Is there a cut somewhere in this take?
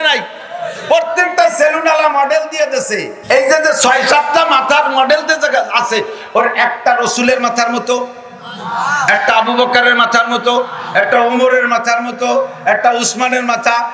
yes; 1 cut; at 3.1 s

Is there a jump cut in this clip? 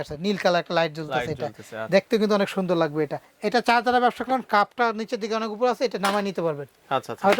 yes; 1 cut; at 3.3 s

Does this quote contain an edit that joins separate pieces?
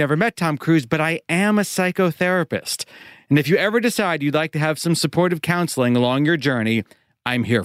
no; 0 cuts

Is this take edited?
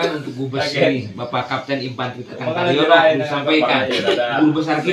no; 0 cuts

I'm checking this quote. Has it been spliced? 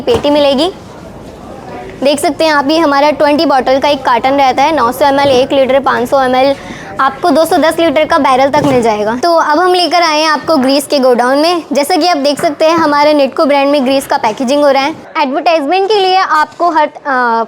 yes; 2 cuts; at 9.2 s, 15.0 s

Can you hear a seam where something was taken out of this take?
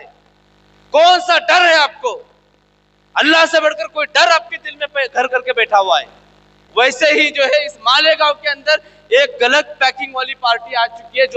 yes; 1 cut; at 6.6 s

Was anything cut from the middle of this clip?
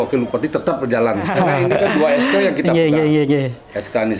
yes; 1 cut; at 1.3 s

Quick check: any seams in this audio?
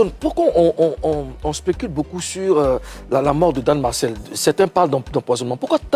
no; 0 cuts

